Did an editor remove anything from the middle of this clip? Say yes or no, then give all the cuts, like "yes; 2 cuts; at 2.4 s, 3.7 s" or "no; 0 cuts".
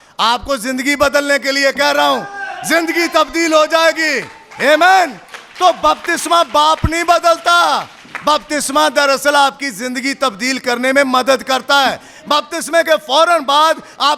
no; 0 cuts